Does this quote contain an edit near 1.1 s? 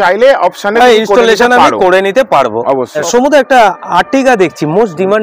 no; 1 cut; at 3.0 s

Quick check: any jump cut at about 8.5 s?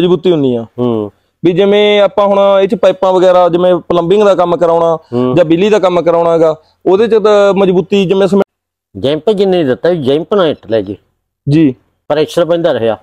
yes; 1 cut; at 8.5 s

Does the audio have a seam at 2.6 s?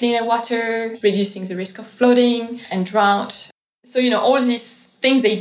yes; 3 cuts; at 0.9 s, 2.6 s, 3.5 s

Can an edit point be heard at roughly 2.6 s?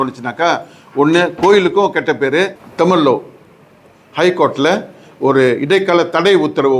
yes; 1 cut; at 2.6 s

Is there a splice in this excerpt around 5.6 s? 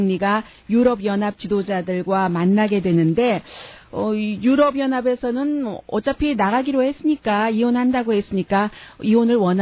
yes; 1 cut; at 5.6 s

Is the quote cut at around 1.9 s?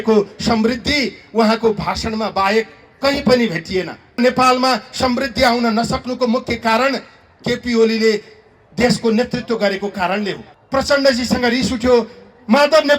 no; 2 cuts; at 4.2 s, 10.5 s

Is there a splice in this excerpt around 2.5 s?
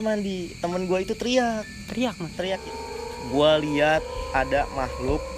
yes; 1 cut; at 2.5 s

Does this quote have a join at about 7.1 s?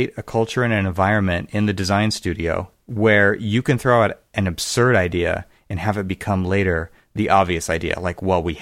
no; 1 cut; at 2.8 s

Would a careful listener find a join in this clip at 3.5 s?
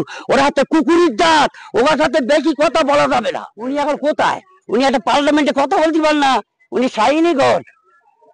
yes; 1 cut; at 3.5 s

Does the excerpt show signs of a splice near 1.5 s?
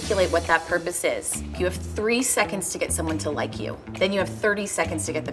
yes; 1 cut; at 1.5 s

